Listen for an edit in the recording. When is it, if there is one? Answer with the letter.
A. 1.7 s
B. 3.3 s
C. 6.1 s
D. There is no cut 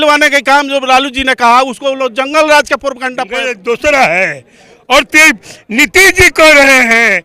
B